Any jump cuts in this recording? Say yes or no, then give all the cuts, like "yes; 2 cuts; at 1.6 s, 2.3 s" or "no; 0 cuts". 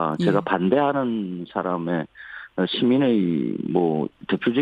no; 0 cuts